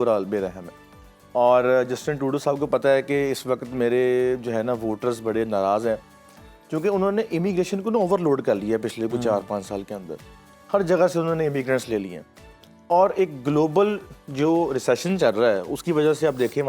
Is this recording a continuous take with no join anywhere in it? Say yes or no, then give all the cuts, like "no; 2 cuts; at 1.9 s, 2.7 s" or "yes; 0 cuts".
yes; 0 cuts